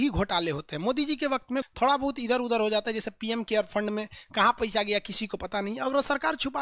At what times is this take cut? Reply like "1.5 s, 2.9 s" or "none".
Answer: 1.7 s